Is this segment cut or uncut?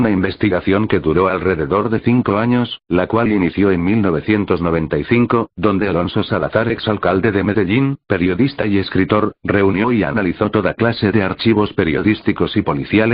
cut